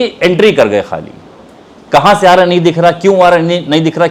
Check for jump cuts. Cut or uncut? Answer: uncut